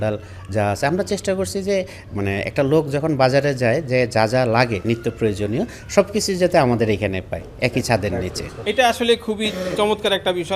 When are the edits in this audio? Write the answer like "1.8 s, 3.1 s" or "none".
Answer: none